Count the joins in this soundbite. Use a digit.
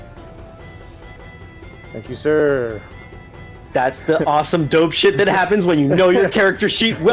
1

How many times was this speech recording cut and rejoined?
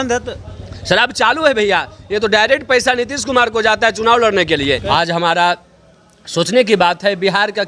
1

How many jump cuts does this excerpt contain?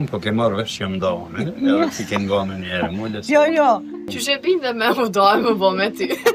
1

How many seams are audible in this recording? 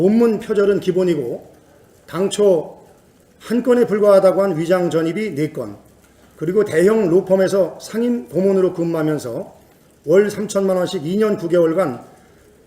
1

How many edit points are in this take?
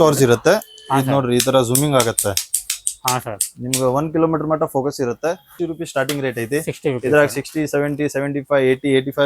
1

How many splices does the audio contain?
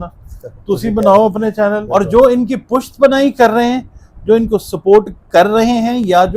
1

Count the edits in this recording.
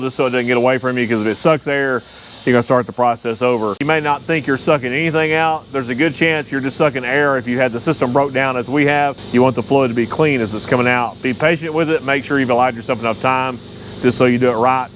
2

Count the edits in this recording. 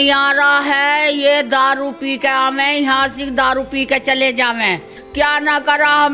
1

